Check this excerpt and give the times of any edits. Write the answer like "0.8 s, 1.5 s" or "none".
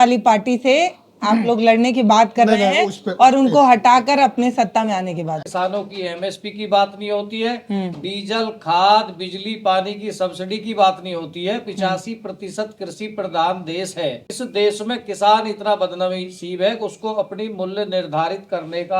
5.4 s, 14.3 s